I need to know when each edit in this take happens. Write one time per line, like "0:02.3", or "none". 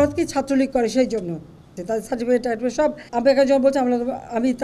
0:01.7
0:03.0